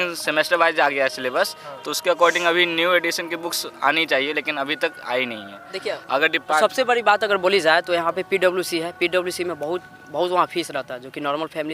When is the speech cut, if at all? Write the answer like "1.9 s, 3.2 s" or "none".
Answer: none